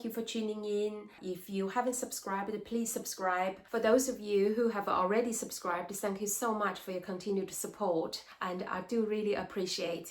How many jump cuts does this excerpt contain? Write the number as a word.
three